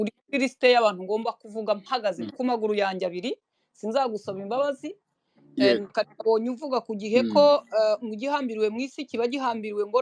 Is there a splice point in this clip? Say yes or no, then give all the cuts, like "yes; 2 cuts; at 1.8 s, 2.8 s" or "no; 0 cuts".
no; 0 cuts